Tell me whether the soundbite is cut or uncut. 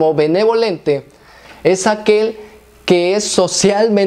uncut